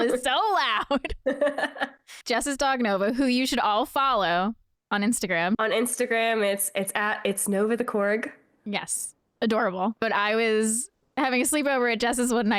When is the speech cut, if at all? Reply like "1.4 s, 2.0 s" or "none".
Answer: 2.1 s, 5.6 s, 10.0 s